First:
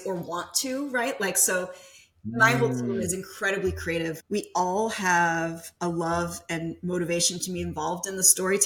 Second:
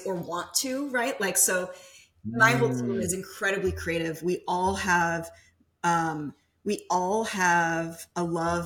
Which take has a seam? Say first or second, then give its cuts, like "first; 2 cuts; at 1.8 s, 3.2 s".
first; 1 cut; at 4.2 s